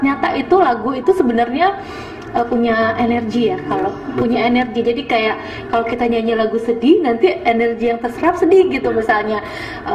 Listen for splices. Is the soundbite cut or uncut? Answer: uncut